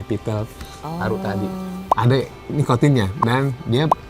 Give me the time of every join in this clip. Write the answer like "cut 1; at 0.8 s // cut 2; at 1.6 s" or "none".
cut 1; at 1.9 s